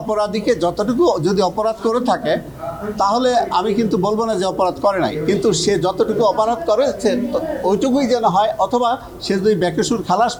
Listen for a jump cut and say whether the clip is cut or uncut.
uncut